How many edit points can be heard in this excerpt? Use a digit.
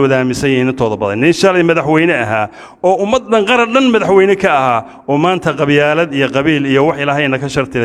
0